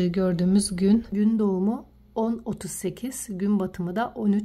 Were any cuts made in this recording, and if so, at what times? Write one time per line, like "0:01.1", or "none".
0:01.1